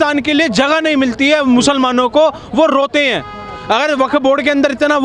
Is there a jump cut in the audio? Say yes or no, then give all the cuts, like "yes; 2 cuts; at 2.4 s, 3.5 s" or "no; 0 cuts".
no; 0 cuts